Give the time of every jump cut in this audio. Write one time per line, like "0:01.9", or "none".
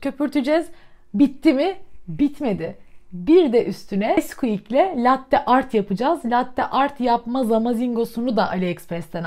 0:04.2